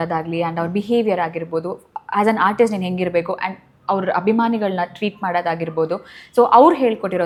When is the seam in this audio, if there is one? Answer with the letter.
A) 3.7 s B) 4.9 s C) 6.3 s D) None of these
D